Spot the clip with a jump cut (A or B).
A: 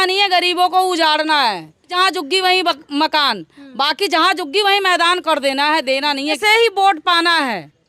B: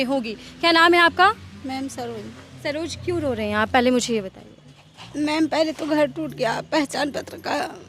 A